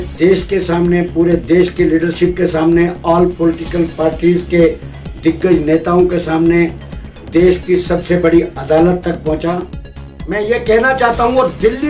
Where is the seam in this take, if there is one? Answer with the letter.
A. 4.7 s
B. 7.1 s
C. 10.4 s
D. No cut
C